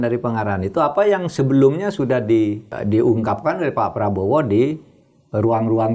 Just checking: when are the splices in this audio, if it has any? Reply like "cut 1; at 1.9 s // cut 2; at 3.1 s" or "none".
cut 1; at 2.8 s